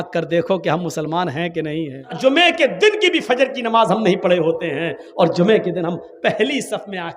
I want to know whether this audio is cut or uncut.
cut